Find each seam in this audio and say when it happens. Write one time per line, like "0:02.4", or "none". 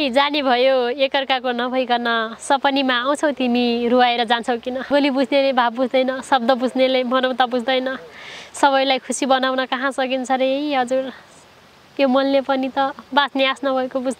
0:04.9